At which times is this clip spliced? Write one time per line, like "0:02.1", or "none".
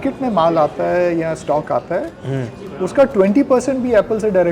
none